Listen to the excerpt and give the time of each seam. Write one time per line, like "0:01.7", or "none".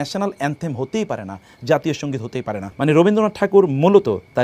0:02.6